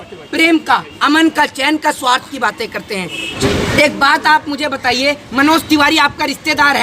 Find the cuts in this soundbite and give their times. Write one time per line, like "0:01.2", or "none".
0:03.3